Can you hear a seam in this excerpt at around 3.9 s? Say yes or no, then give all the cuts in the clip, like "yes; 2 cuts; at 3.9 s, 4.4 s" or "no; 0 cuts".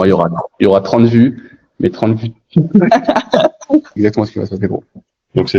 yes; 1 cut; at 3.9 s